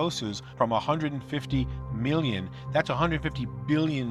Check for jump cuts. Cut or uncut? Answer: uncut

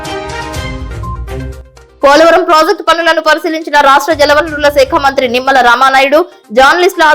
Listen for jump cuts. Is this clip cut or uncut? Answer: cut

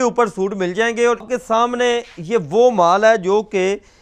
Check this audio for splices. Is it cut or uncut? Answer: cut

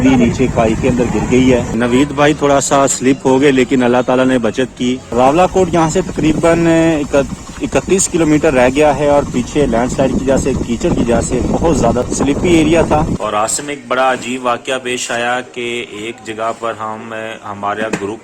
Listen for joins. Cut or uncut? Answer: cut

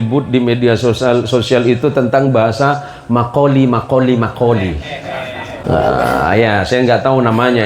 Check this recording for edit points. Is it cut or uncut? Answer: cut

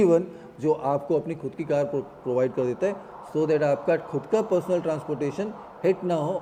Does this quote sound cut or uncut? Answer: uncut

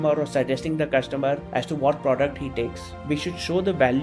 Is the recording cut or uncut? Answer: cut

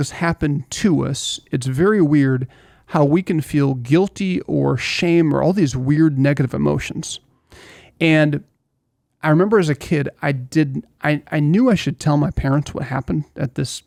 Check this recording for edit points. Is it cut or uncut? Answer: uncut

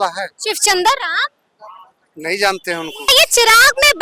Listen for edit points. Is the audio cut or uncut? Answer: cut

